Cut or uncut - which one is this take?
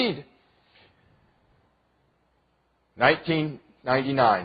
cut